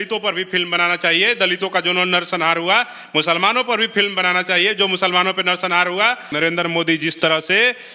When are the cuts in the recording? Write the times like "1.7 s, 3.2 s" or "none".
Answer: 6.3 s